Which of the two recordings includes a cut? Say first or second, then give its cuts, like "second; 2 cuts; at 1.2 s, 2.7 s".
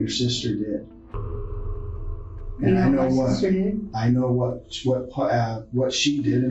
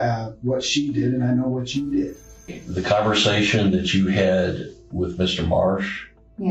second; 1 cut; at 2.6 s